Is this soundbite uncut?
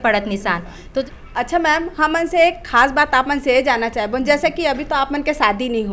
no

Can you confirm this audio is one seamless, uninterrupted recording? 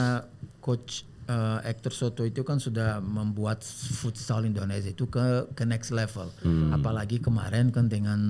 yes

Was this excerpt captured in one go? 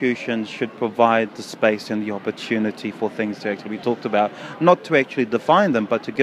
yes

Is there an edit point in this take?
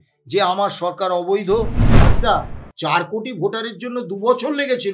yes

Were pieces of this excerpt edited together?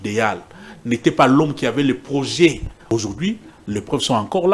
yes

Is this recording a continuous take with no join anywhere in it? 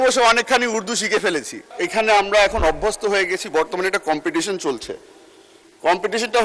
no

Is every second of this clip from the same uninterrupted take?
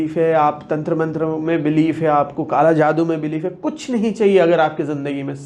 yes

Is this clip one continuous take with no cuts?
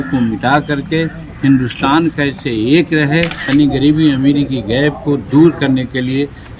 no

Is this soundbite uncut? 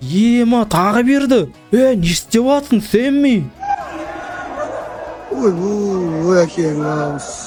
yes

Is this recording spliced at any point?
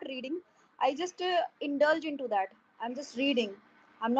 no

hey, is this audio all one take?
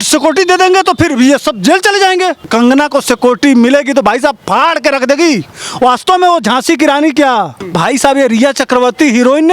no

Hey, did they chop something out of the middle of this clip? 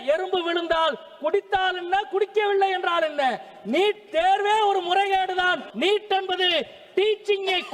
yes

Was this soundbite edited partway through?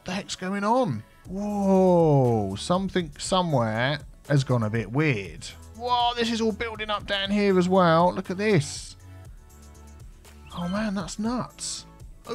no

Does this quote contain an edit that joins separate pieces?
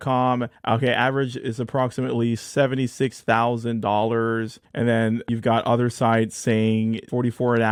no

